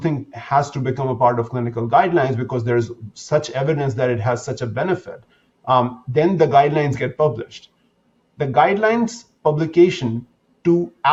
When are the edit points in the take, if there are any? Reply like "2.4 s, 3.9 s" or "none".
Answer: none